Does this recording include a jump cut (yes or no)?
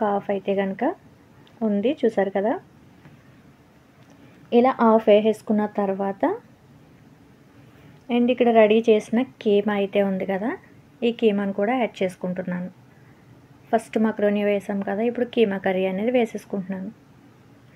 no